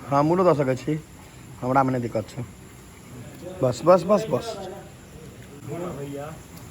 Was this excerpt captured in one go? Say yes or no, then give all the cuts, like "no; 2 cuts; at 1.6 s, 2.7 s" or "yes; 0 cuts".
no; 1 cut; at 5.5 s